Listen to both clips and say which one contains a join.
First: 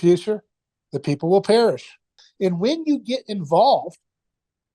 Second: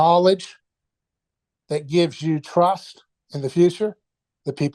first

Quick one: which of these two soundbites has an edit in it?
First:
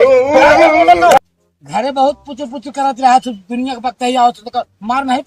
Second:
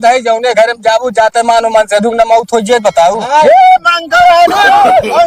first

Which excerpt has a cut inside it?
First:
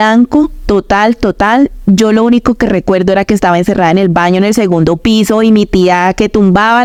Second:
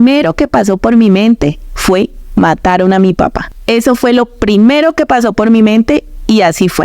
second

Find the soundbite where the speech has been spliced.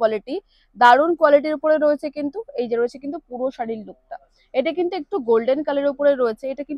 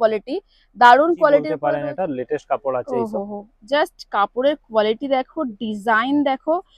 second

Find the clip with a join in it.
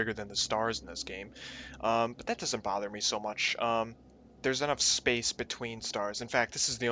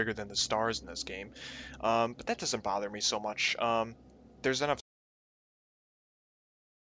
first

